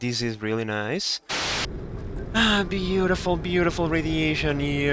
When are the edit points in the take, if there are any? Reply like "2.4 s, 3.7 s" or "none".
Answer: 1.4 s